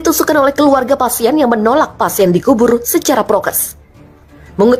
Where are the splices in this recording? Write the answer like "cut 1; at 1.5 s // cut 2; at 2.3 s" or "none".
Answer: none